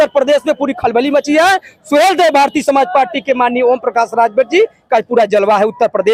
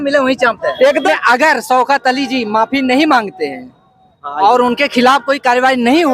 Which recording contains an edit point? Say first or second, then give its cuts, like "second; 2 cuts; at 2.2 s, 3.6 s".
second; 1 cut; at 1.1 s